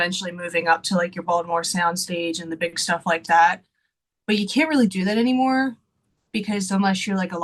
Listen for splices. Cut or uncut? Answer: uncut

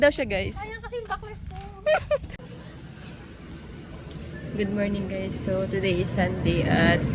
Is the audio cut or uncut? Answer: cut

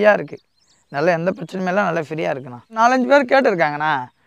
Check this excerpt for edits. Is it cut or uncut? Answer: cut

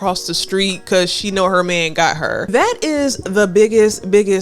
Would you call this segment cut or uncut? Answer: cut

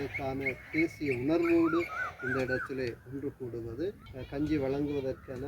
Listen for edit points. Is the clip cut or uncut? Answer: cut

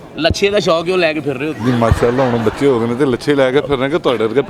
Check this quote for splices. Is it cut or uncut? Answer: uncut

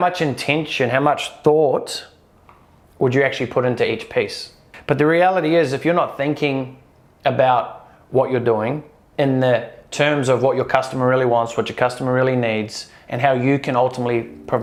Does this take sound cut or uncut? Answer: uncut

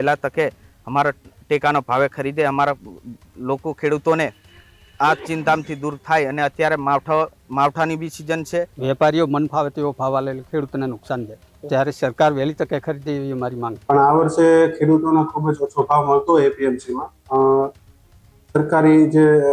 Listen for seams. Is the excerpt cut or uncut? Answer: cut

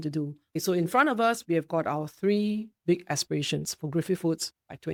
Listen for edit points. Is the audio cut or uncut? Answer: uncut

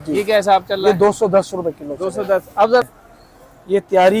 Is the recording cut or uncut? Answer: cut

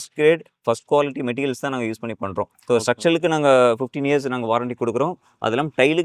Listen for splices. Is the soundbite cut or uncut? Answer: uncut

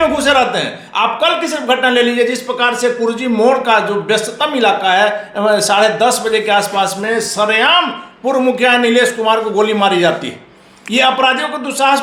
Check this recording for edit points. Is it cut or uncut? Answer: uncut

